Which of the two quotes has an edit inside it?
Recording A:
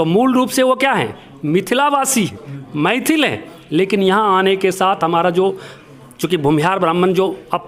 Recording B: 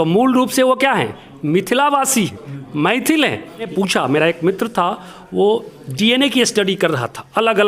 B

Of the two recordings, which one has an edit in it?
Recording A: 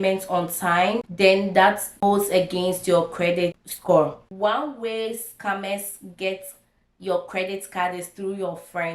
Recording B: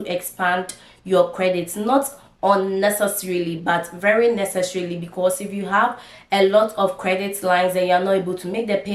A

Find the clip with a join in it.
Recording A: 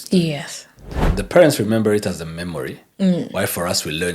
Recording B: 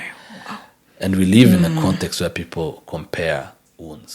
A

